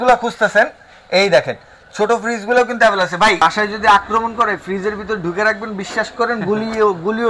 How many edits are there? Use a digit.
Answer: 1